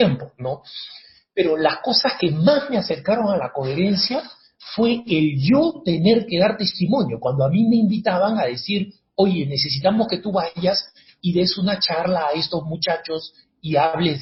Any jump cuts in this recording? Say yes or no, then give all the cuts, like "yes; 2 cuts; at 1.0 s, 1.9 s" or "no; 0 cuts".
no; 0 cuts